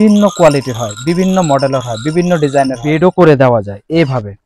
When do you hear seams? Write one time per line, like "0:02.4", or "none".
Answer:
0:02.9